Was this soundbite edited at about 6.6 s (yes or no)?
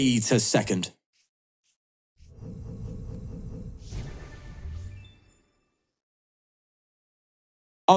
no